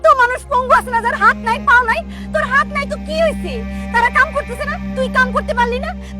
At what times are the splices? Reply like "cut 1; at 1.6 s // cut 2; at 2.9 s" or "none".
none